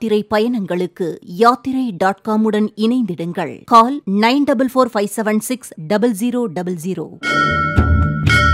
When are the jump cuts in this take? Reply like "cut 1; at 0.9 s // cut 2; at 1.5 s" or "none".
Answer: cut 1; at 7.1 s